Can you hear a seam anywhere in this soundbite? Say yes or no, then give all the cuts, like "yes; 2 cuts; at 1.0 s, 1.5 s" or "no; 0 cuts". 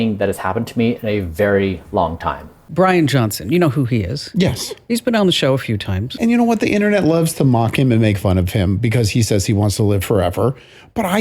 yes; 3 cuts; at 2.6 s, 4.9 s, 6.0 s